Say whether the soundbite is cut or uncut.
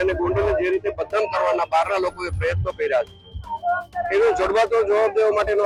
uncut